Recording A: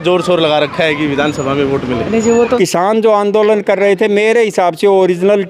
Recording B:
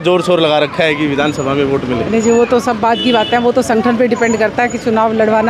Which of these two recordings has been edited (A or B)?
A